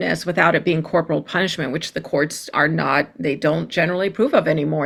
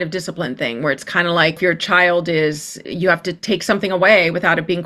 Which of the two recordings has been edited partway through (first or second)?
second